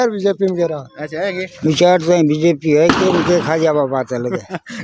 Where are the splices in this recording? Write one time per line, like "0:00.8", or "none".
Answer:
0:01.5